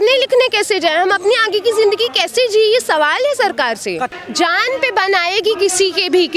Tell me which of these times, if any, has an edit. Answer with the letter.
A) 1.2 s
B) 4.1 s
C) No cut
B